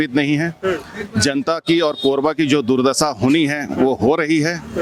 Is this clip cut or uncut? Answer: uncut